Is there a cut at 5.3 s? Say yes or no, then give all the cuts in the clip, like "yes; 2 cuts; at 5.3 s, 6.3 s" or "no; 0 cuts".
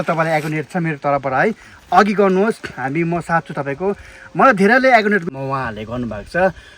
yes; 1 cut; at 5.3 s